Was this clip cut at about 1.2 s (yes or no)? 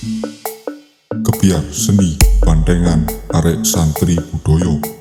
no